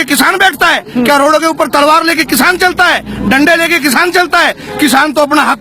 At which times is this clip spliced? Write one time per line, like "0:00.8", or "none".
none